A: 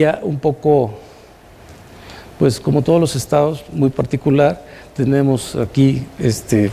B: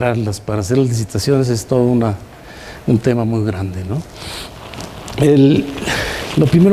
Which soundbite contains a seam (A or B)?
B